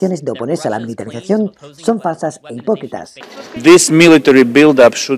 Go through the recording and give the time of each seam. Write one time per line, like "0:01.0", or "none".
0:03.3